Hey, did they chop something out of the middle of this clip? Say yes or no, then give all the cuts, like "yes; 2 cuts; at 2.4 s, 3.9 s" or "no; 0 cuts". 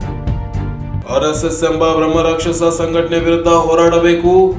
no; 0 cuts